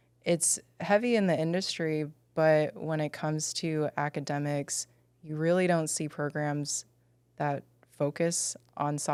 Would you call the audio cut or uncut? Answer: uncut